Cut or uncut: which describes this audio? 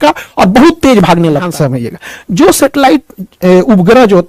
cut